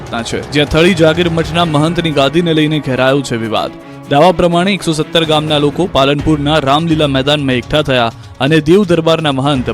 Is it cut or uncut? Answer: cut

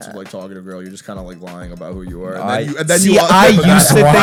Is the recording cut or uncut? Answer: uncut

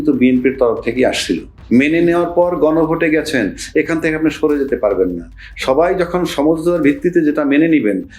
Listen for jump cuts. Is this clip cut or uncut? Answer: cut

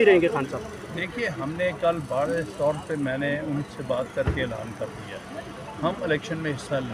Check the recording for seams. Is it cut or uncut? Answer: uncut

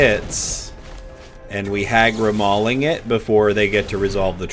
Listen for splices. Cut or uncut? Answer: uncut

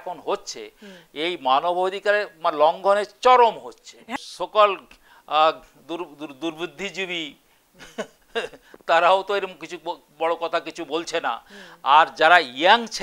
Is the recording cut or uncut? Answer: cut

